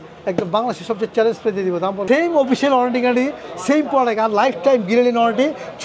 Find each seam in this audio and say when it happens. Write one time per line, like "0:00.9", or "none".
0:02.0